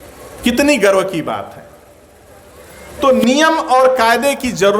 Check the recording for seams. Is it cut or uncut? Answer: cut